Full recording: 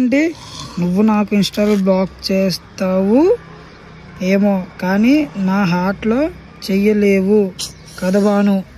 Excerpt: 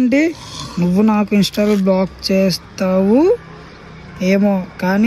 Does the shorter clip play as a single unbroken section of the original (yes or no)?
yes